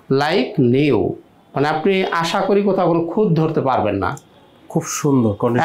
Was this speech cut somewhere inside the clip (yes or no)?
no